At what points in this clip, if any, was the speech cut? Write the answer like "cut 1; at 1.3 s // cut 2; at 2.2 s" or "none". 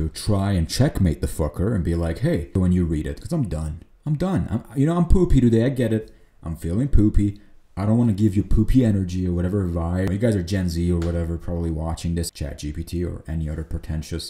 cut 1; at 2.6 s // cut 2; at 10.1 s // cut 3; at 12.3 s